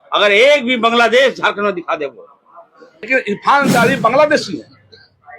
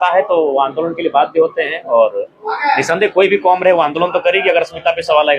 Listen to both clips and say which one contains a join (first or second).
first